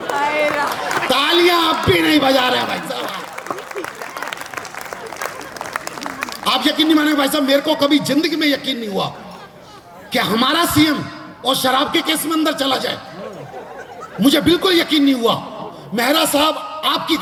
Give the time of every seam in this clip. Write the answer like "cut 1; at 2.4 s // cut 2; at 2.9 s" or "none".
none